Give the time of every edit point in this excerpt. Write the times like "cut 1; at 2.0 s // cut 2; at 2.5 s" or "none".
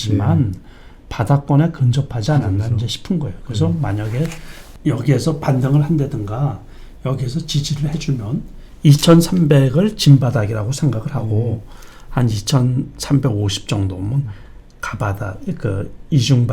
none